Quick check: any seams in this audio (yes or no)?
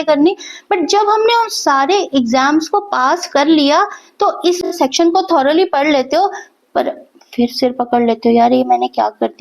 yes